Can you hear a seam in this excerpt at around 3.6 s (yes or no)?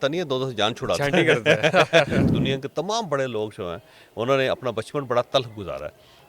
no